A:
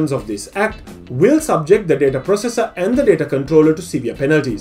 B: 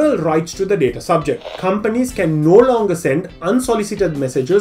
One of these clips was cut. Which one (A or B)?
B